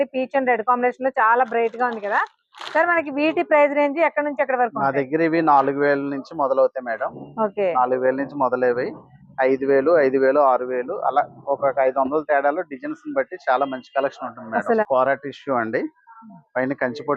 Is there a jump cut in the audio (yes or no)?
yes